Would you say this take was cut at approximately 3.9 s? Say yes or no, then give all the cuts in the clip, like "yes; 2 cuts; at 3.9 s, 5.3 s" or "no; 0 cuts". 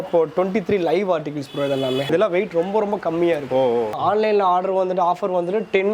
yes; 2 cuts; at 2.1 s, 3.9 s